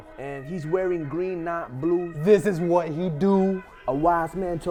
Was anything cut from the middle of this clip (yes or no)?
no